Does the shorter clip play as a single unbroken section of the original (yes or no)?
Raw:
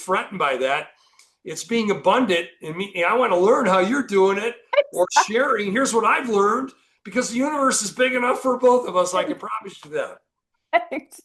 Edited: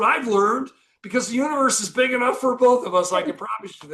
yes